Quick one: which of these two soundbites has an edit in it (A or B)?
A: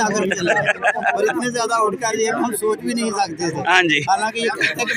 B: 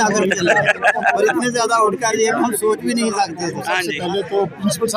B